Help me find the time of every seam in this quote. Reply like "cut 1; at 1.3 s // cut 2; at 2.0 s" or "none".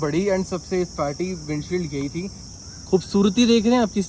cut 1; at 2.4 s